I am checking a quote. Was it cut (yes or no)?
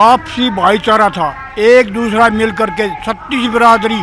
no